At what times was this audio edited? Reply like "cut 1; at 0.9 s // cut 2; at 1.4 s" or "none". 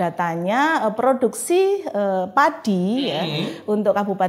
none